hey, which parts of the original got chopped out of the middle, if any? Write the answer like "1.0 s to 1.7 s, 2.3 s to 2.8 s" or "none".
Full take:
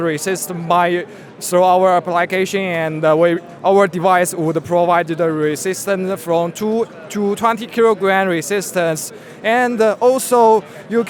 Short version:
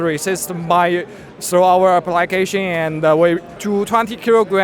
3.5 s to 7.0 s